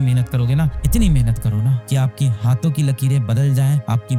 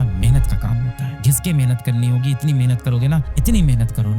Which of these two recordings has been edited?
second; 1 cut; at 1.2 s

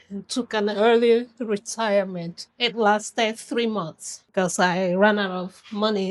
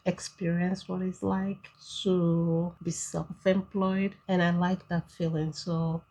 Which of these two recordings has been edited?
second; 1 cut; at 4.2 s

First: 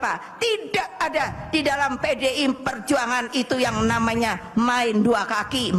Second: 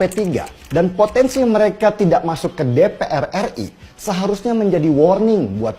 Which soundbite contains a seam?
second; 1 cut; at 0.9 s

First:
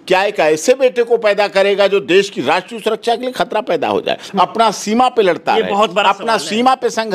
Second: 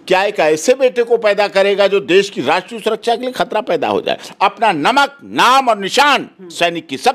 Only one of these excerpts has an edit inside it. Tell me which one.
second; 1 cut; at 4.2 s

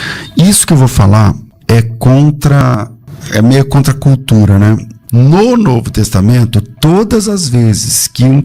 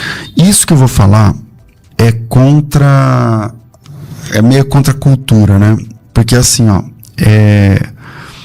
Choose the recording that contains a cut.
first; 3 cuts; at 1.5 s, 2.6 s, 4.9 s

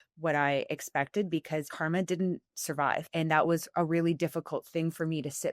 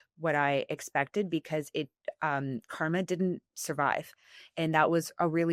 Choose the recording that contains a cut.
first; 2 cuts; at 1.7 s, 3.1 s

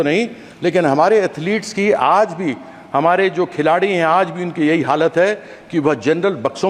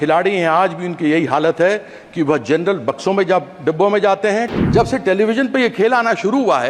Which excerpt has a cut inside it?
second; 1 cut; at 4.5 s

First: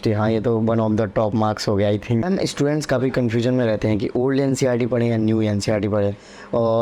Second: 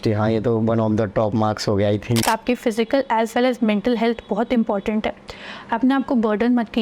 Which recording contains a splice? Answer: second; 1 cut; at 2.2 s

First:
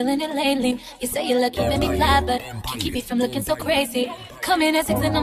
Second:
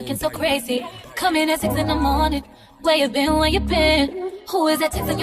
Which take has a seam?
second; 1 cut; at 3.2 s

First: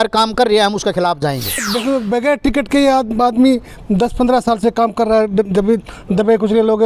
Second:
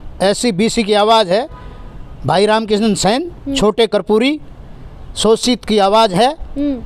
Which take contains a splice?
first; 1 cut; at 1.7 s

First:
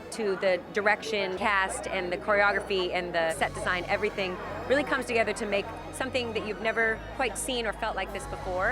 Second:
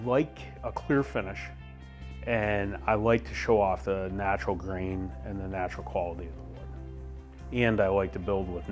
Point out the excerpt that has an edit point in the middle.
first; 3 cuts; at 1.4 s, 3.4 s, 7.1 s

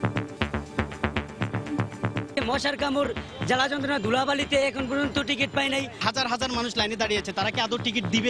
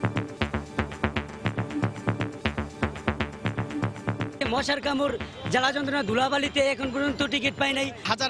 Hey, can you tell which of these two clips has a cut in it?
first; 1 cut; at 1.3 s

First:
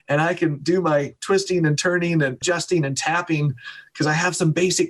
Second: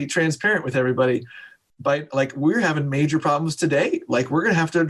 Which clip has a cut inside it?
first; 1 cut; at 2.4 s

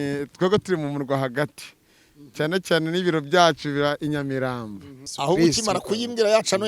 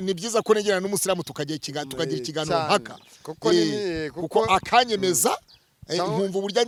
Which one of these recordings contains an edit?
first; 1 cut; at 5.1 s

